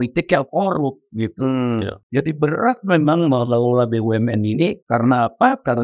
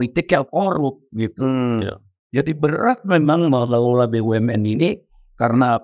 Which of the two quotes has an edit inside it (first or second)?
first